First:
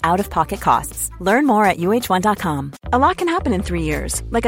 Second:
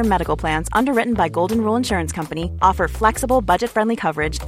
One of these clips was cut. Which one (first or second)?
first